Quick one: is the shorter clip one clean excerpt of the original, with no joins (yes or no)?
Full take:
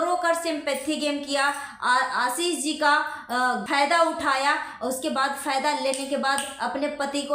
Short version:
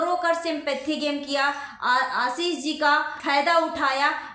no